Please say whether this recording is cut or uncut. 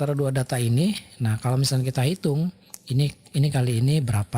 uncut